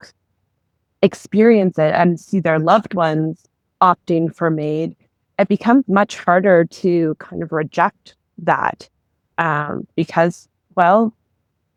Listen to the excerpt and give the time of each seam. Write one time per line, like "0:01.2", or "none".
none